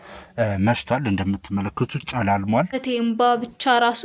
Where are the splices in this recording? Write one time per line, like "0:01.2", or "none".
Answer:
0:02.8